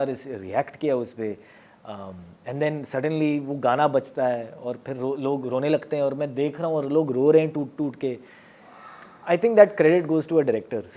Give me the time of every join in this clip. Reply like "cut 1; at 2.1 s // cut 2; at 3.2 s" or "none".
none